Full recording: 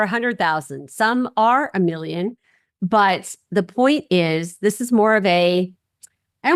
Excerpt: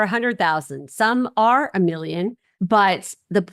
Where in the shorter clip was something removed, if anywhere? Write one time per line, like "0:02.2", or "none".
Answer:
0:02.5